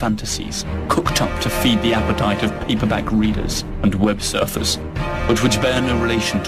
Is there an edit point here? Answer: yes; 1 cut; at 5.5 s

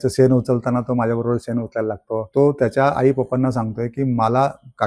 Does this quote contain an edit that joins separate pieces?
yes; 1 cut; at 2.2 s

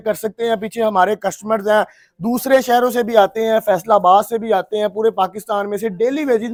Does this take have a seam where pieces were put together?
no; 0 cuts

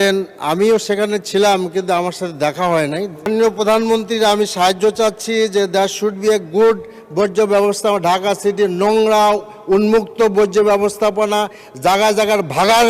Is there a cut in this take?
yes; 1 cut; at 3.3 s

